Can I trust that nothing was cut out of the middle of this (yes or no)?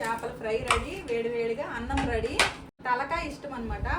no